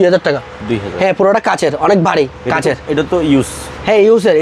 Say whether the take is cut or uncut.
uncut